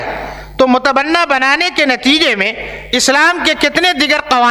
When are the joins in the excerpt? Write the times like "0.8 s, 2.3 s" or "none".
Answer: none